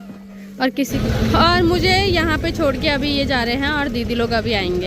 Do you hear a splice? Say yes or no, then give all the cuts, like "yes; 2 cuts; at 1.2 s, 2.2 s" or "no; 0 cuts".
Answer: yes; 1 cut; at 0.9 s